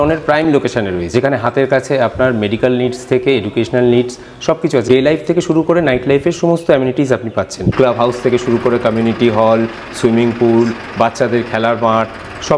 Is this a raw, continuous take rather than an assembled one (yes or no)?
no